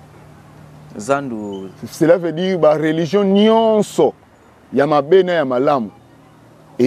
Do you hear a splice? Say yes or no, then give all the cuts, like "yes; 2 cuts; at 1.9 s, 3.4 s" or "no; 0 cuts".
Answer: no; 0 cuts